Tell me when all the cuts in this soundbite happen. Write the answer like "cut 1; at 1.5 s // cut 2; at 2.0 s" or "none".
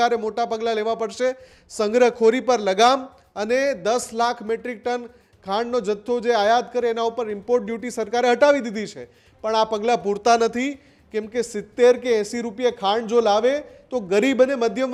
none